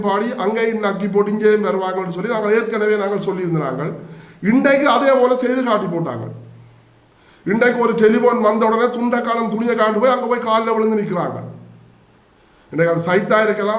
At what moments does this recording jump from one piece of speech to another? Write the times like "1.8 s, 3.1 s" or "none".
none